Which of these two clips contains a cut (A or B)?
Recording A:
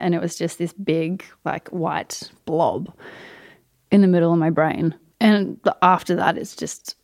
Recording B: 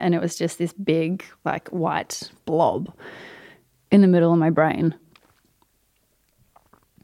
A